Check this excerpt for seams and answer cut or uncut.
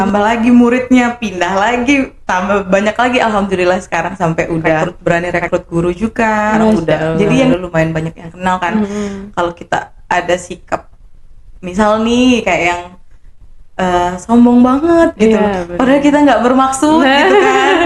cut